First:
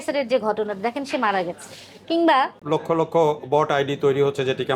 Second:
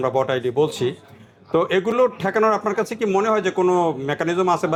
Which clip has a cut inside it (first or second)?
first